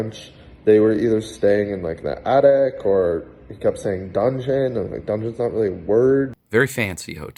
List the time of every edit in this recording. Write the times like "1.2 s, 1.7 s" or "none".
6.3 s